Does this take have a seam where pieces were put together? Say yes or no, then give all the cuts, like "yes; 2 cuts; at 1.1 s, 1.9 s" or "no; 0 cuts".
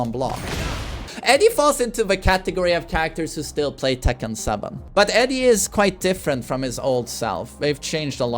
yes; 2 cuts; at 1.0 s, 4.8 s